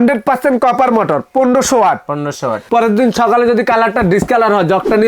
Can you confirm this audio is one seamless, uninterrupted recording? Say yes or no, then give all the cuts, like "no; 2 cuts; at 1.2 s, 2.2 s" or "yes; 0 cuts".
no; 1 cut; at 2.5 s